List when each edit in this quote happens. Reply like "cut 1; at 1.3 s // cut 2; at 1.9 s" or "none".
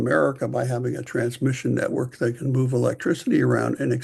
none

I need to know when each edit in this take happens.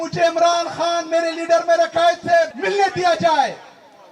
cut 1; at 2.6 s

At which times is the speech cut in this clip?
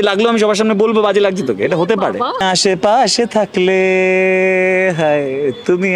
cut 1; at 2.4 s

